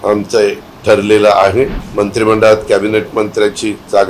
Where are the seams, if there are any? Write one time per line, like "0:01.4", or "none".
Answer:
0:01.8

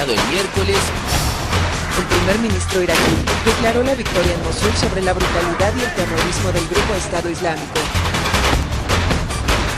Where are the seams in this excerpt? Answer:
0:07.2

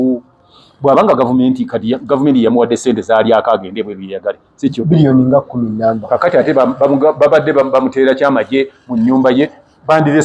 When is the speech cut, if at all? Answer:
none

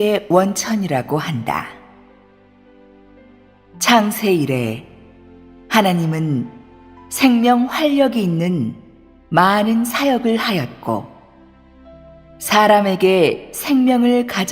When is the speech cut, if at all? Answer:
0:13.0

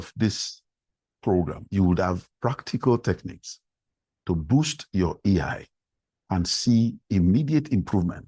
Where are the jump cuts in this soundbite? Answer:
0:01.6

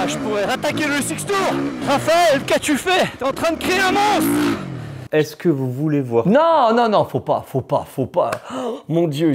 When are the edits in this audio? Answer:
0:01.8
0:03.2
0:05.0

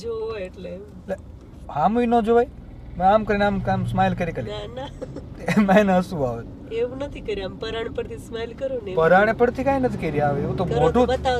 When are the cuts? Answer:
none

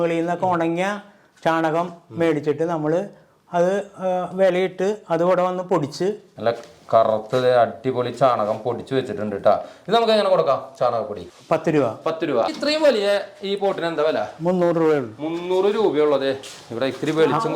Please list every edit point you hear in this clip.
0:06.3
0:11.2
0:12.5

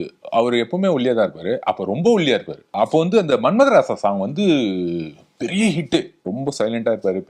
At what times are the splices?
0:02.7
0:06.2

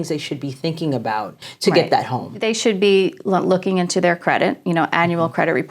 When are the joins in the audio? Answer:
0:01.5
0:02.3

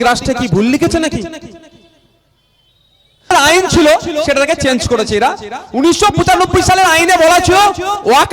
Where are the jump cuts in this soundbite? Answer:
0:03.3

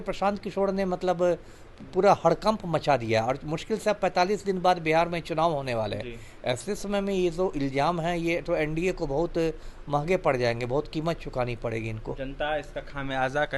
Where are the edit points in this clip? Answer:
none

